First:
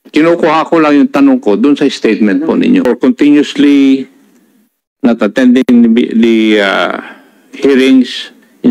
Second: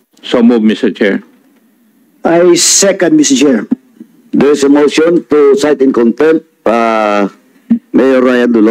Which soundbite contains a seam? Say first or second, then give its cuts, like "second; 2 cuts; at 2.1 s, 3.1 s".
first; 1 cut; at 2.9 s